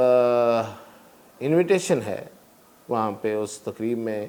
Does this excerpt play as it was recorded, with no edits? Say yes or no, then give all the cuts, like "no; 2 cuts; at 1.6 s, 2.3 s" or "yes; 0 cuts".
yes; 0 cuts